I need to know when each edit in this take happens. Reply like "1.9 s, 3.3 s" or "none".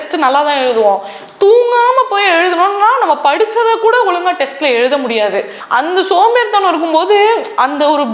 5.6 s